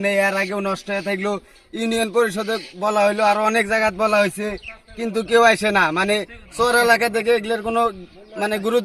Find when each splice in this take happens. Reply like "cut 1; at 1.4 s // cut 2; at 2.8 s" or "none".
none